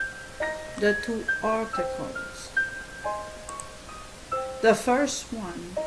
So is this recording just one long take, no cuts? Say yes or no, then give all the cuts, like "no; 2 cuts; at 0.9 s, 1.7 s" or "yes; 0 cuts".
yes; 0 cuts